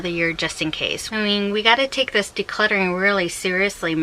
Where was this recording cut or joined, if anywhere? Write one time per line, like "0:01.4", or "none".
0:00.9

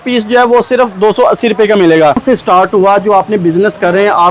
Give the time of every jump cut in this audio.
0:02.2

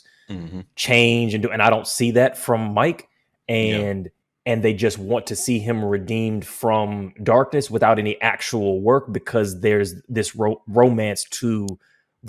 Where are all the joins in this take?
0:04.1

